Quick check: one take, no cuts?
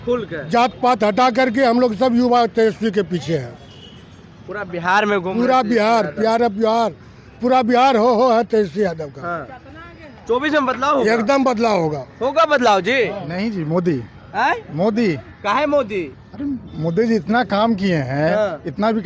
yes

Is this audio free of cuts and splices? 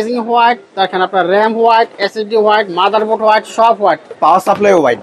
yes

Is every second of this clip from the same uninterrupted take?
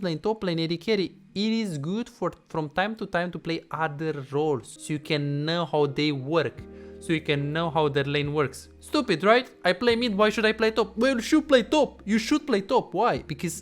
no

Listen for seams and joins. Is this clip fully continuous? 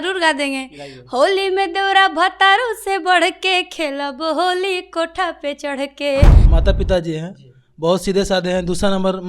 no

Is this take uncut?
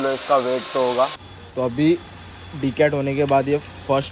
no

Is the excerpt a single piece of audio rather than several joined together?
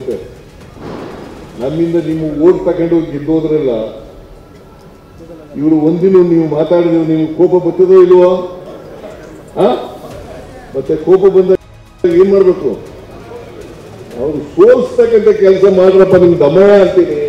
yes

